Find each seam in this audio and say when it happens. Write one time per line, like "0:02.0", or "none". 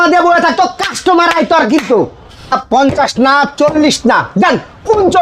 0:02.6

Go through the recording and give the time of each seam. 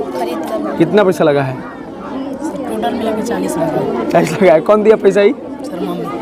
none

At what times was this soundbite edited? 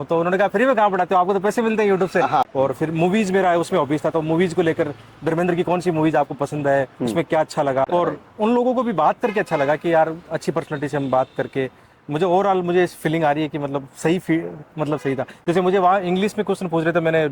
0:02.4
0:07.8

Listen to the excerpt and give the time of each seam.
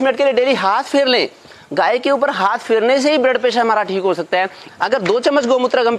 0:04.6

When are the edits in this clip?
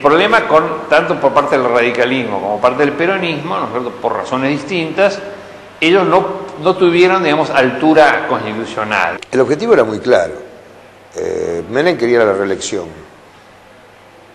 0:09.1

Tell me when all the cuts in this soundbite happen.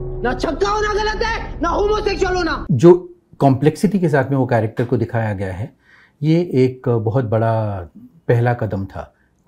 0:02.6

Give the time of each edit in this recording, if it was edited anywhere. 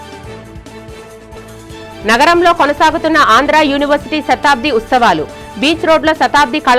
0:01.3

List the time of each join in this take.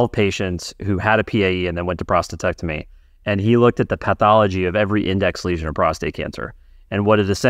none

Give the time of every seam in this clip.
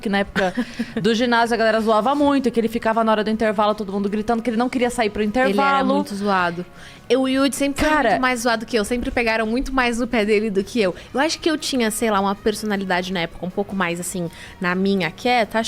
none

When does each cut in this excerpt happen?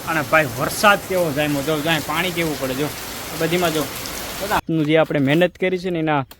0:04.6

